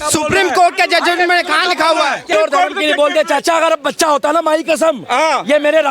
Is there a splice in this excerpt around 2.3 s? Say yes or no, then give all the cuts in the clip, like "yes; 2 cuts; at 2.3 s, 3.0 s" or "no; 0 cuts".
yes; 1 cut; at 2.3 s